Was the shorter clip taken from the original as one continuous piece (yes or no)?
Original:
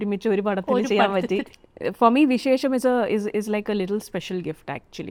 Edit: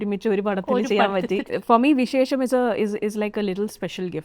no